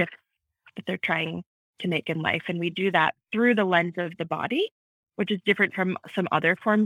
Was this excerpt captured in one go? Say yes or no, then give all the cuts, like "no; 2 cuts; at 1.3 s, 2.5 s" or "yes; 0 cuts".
yes; 0 cuts